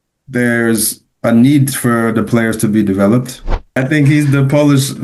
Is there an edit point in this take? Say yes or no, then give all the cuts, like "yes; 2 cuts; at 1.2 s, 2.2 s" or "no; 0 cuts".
yes; 1 cut; at 3.8 s